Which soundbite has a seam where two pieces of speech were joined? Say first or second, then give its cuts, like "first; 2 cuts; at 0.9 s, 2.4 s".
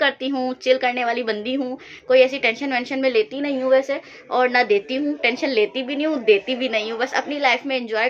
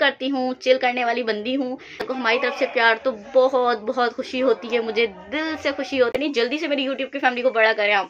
second; 2 cuts; at 2.0 s, 6.2 s